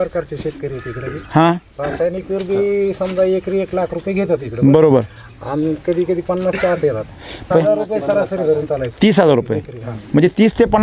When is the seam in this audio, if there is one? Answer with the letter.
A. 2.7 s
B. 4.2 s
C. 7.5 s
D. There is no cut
C